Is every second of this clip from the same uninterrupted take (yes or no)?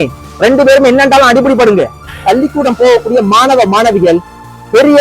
no